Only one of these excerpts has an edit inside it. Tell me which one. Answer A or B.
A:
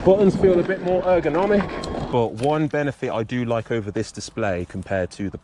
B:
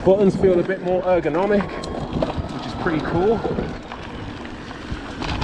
A